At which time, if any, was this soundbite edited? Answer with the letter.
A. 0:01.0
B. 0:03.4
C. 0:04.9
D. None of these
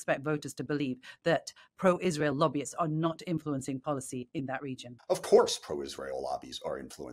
C